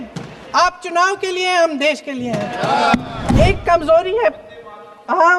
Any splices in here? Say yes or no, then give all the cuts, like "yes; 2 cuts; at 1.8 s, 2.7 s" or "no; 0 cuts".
yes; 1 cut; at 3.4 s